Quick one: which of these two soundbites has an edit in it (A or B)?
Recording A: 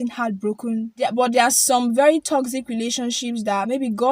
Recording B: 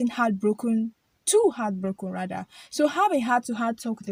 A